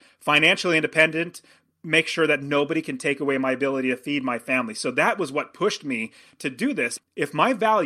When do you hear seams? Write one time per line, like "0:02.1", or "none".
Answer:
0:06.9

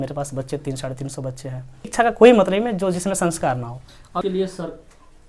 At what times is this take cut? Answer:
0:01.9
0:04.2

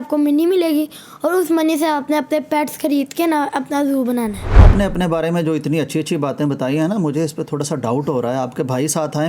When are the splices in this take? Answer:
0:04.7

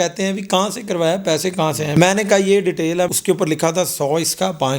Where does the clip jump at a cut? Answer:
0:01.9
0:03.1

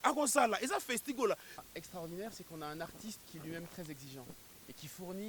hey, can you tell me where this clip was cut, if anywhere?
0:01.6

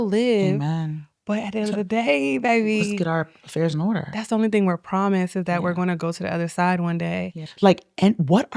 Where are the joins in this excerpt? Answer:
0:07.4

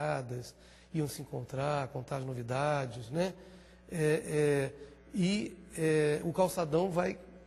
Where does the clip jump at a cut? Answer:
none

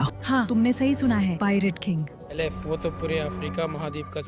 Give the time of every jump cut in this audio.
0:02.2

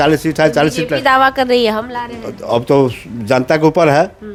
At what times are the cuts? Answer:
none

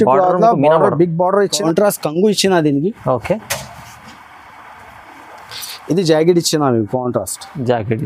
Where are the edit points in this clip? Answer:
0:01.5

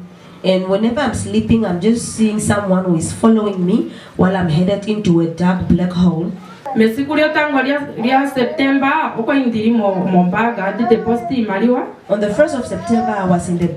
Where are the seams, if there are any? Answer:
0:06.6

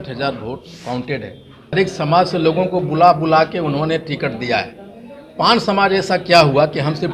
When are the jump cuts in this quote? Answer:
0:01.7

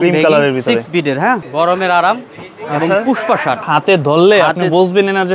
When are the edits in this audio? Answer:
0:01.4
0:03.7

